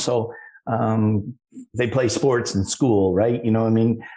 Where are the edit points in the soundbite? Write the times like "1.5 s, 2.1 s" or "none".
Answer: none